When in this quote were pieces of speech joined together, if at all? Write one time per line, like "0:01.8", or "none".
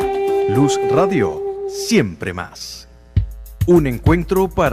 0:03.6